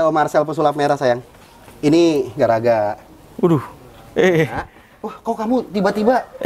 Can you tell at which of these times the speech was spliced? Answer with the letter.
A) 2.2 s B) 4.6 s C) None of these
C